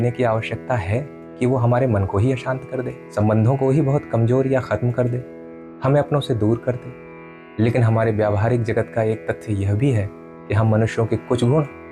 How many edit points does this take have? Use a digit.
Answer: 1